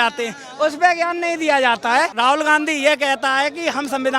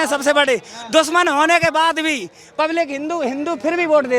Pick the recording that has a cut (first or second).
first